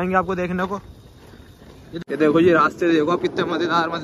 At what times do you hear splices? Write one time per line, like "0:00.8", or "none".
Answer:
0:02.0

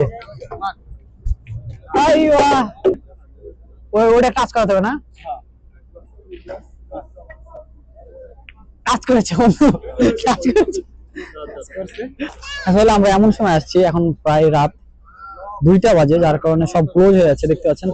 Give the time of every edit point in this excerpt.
0:03.0
0:12.3

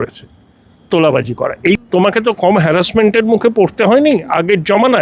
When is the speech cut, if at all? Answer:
0:01.7

